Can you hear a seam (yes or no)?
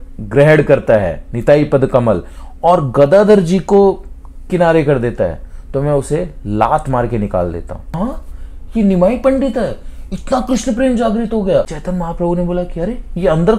yes